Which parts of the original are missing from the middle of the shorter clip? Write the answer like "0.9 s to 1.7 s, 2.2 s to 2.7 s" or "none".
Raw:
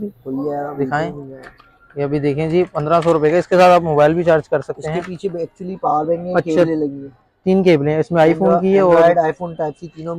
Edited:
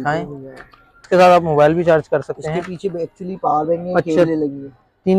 1.9 s to 3.5 s